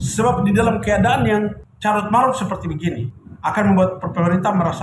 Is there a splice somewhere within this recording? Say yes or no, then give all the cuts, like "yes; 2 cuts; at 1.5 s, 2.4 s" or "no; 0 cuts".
yes; 1 cut; at 3.1 s